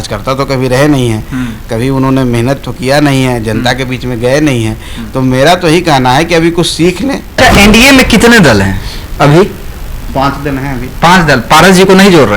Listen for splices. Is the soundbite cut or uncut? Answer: cut